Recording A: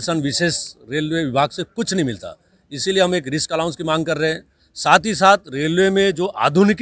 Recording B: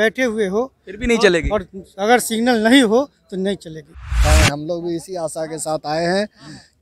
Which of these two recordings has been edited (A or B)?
B